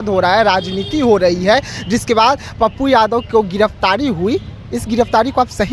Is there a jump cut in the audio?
no; 0 cuts

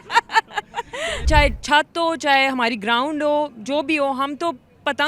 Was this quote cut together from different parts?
yes; 1 cut; at 1.2 s

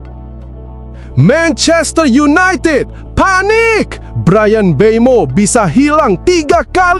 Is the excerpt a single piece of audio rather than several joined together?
no; 1 cut; at 1.1 s

